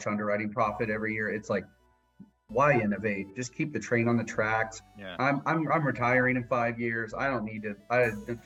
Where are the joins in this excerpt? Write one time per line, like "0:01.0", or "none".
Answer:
none